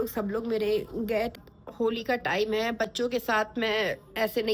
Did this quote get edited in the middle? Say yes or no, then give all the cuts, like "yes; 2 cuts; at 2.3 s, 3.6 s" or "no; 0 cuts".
yes; 1 cut; at 1.3 s